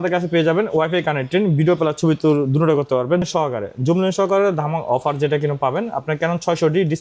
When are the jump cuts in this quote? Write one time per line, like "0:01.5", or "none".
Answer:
0:03.3